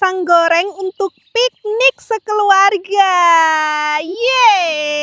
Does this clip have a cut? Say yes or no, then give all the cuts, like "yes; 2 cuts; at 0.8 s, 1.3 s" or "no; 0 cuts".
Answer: no; 0 cuts